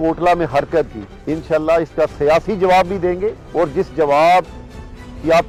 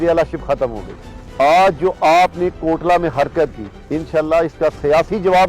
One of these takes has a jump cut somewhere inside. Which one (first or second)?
second